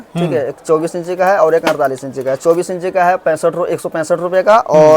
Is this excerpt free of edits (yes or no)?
yes